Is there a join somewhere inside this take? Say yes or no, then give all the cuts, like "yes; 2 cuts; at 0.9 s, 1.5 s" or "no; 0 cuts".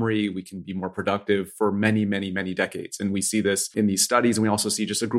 yes; 1 cut; at 3.7 s